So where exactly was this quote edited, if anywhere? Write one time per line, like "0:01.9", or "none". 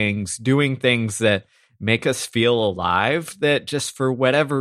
none